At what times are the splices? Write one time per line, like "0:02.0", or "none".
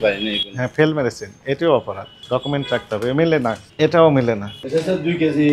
0:04.6

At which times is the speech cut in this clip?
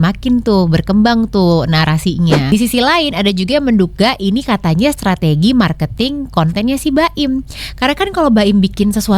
0:02.5

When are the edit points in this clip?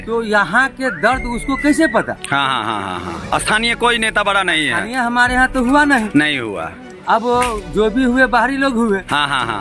none

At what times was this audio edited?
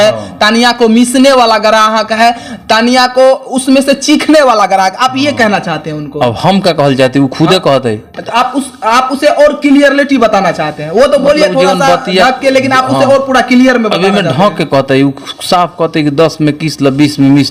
none

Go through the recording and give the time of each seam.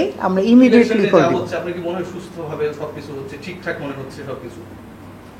none

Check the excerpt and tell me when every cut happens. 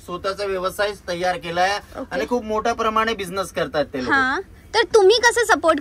none

